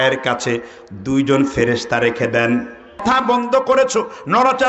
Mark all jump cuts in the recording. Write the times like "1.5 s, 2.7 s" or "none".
3.0 s